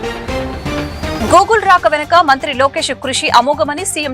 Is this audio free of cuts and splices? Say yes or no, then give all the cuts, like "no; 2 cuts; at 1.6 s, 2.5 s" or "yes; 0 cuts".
no; 1 cut; at 1.1 s